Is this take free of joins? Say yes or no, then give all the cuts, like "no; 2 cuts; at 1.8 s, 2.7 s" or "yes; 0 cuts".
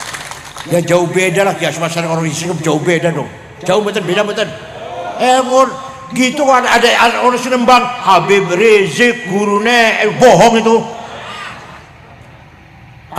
yes; 0 cuts